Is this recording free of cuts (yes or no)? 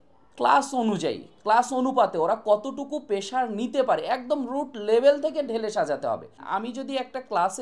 no